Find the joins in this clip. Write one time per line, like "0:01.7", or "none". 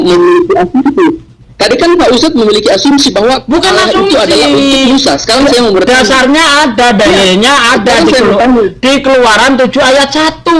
none

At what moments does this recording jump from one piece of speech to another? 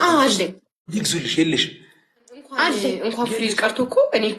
0:03.1

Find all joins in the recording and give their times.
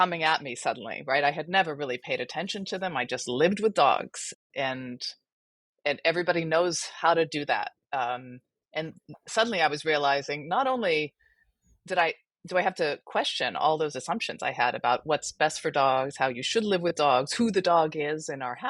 0:04.4

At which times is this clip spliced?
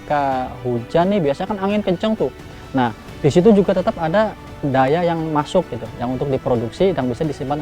0:04.5

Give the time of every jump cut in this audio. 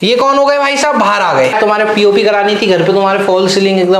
0:01.5

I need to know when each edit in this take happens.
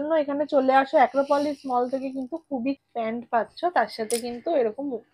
0:02.8

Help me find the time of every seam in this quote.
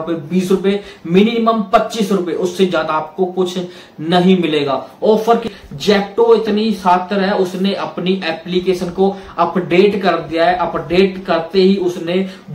0:05.5

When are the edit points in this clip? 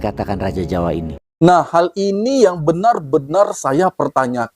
0:01.2

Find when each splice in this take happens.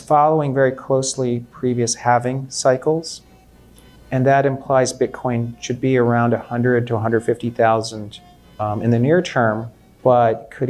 none

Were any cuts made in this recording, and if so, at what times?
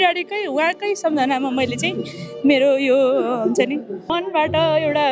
0:04.1

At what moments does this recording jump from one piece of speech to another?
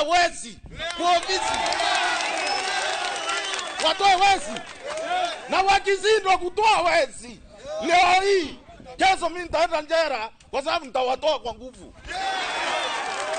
none

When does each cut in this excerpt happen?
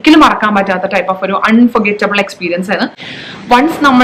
0:03.0

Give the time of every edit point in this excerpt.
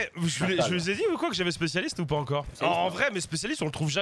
0:02.5

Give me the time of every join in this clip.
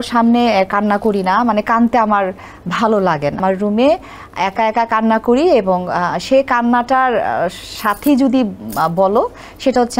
0:03.4

